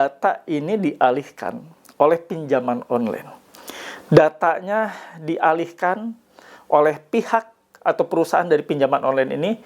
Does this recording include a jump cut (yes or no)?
no